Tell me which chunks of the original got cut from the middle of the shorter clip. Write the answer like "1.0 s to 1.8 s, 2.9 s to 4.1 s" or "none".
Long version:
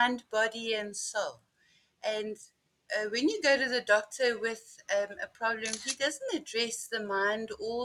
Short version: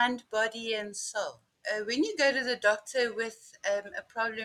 1.5 s to 2.7 s